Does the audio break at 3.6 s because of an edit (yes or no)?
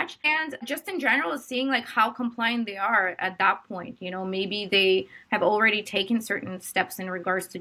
no